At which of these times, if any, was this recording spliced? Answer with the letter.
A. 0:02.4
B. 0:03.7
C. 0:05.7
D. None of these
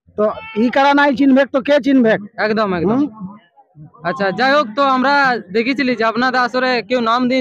D